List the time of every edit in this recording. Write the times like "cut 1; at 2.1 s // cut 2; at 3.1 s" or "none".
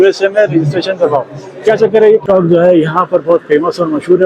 cut 1; at 2.2 s